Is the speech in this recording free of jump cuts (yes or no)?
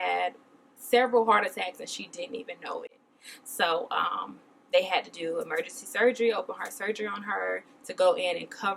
yes